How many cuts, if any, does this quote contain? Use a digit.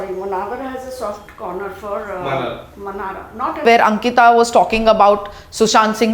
1